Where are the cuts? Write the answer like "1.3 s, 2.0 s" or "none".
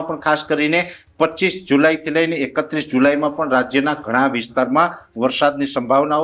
none